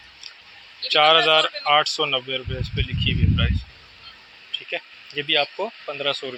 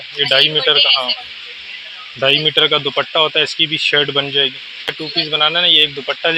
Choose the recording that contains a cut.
second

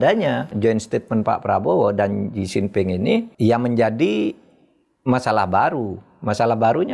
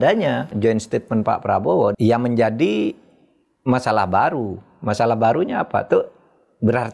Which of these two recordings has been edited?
second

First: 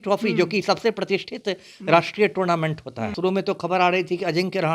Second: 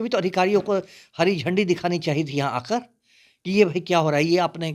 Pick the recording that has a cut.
first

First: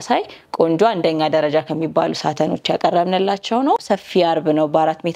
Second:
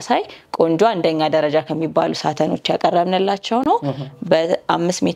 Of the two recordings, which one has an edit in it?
first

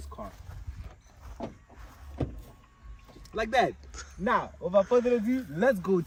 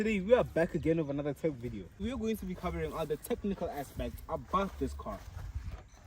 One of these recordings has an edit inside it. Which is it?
second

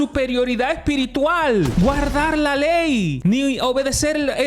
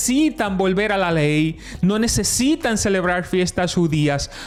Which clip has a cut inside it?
first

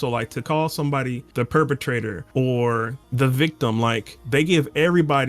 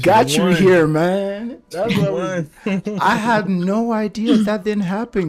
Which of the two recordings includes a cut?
first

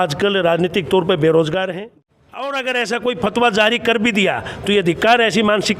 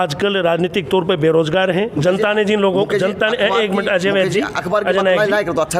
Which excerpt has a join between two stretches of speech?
first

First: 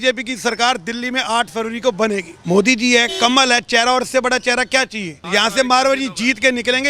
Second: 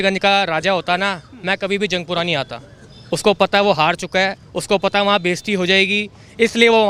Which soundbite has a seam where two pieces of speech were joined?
first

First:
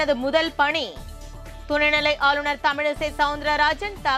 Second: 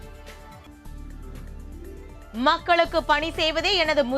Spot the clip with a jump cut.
second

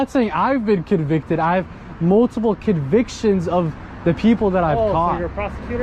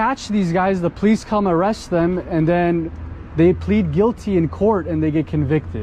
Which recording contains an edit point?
second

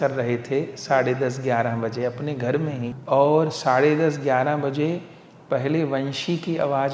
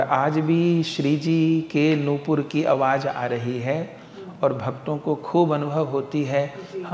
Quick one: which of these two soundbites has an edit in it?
first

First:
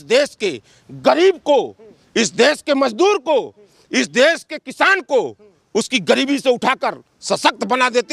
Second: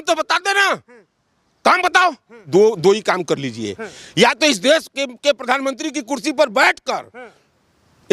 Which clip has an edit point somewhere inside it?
second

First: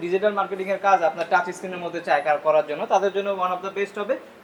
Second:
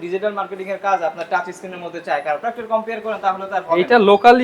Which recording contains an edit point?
second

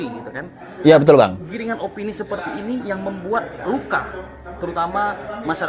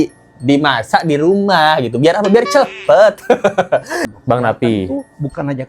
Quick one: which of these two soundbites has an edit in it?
second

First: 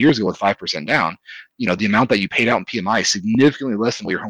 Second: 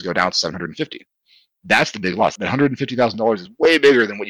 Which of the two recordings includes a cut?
second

